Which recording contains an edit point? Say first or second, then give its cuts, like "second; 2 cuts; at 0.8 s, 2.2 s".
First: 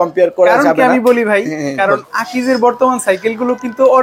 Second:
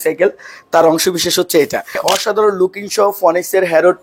second; 1 cut; at 2.0 s